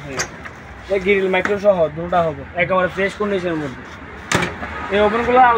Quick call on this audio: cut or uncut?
uncut